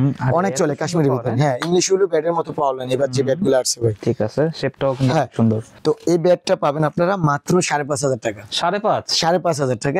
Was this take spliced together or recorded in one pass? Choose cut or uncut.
cut